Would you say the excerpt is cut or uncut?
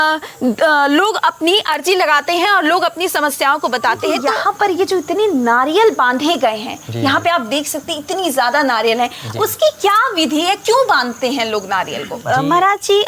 cut